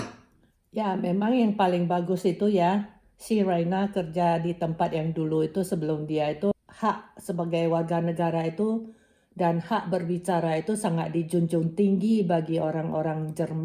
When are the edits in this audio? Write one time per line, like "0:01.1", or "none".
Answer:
0:06.5

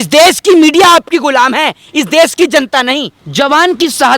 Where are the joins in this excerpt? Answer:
0:03.2

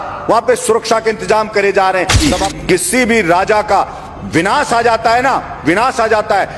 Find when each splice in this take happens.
0:02.2

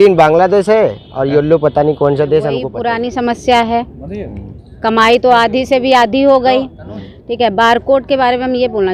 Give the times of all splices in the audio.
0:02.7

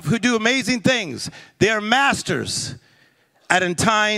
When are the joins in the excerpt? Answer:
none

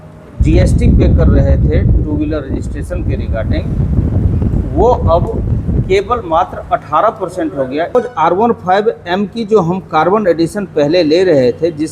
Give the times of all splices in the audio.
0:08.0

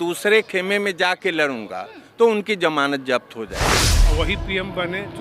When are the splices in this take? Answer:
0:03.9

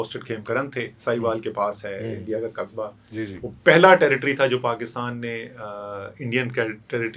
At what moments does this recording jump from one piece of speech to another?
none

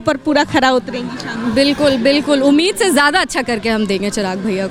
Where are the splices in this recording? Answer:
none

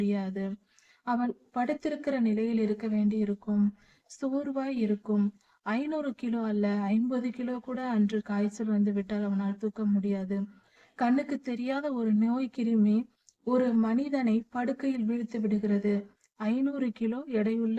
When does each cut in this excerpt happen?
0:01.3

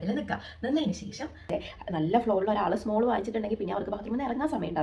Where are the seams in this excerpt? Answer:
0:01.5

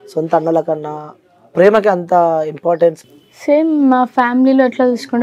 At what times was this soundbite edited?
0:03.0

